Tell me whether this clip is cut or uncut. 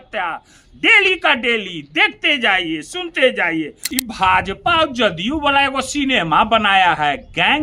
cut